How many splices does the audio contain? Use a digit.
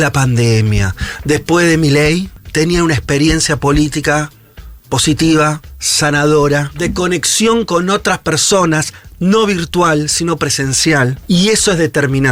3